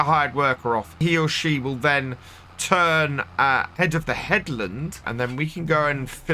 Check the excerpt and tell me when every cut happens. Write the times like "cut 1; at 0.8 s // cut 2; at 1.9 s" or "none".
cut 1; at 1.0 s // cut 2; at 3.7 s // cut 3; at 5.1 s